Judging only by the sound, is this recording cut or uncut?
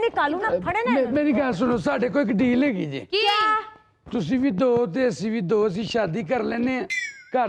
uncut